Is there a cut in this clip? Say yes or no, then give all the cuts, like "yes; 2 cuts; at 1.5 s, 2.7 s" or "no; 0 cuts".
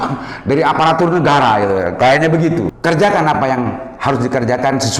yes; 1 cut; at 2.7 s